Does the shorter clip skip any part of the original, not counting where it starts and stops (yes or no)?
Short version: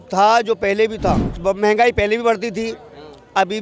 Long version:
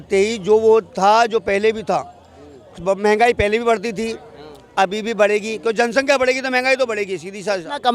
yes